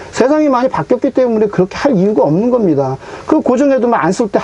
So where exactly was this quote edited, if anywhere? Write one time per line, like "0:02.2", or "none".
none